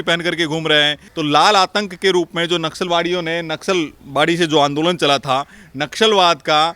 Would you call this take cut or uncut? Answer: cut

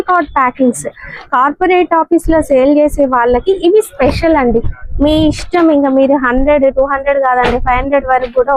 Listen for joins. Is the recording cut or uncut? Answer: uncut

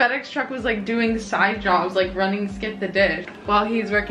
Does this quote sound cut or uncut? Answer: uncut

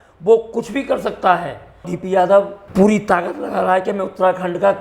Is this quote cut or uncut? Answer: cut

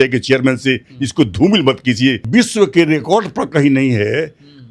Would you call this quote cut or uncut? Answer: cut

